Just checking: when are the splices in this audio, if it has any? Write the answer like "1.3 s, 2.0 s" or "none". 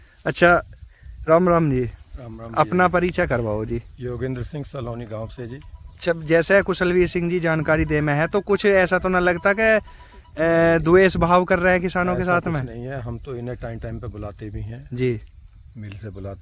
none